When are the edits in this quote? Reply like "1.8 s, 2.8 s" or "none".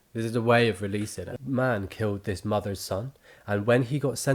1.3 s

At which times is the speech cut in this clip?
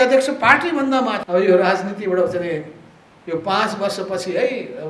1.2 s

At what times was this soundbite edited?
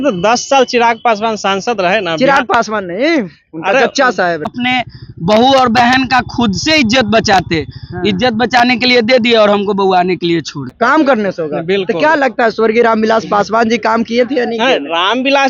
4.5 s, 10.6 s

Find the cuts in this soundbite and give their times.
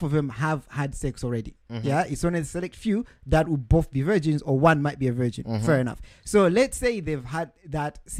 none

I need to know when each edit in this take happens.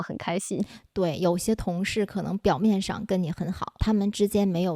3.8 s

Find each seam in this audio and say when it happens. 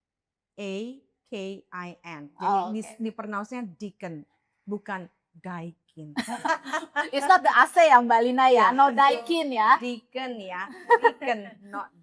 none

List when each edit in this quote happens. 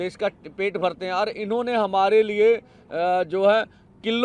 none

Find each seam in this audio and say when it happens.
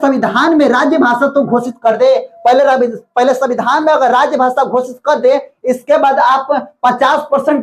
none

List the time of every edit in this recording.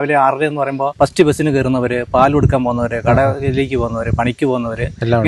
0.9 s

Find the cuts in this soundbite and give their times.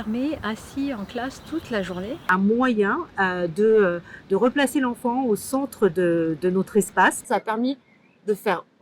2.2 s, 7.2 s

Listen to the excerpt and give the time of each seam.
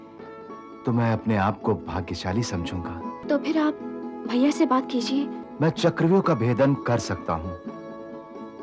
3.2 s, 5.4 s

